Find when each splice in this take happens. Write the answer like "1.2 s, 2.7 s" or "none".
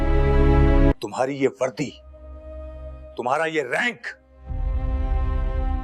0.9 s